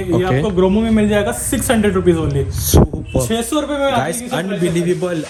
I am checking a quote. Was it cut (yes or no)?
no